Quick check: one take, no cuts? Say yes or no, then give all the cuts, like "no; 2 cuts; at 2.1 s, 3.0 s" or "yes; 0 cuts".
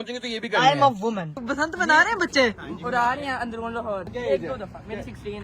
no; 2 cuts; at 1.4 s, 4.1 s